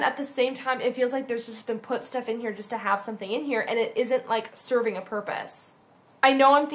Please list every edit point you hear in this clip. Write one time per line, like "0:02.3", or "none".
none